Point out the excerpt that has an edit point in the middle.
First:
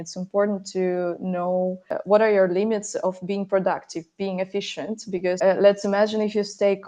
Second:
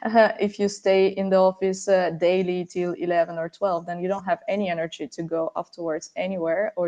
first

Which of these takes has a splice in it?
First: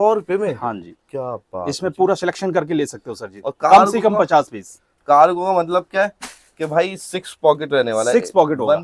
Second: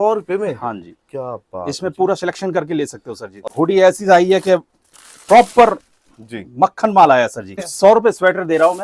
second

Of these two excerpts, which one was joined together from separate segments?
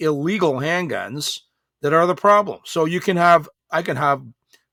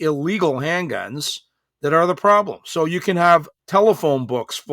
second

